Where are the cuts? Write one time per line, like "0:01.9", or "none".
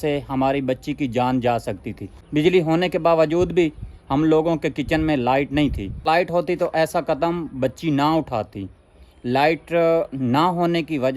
0:02.2